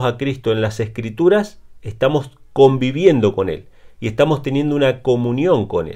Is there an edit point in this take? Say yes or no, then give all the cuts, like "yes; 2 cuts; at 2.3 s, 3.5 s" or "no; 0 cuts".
no; 0 cuts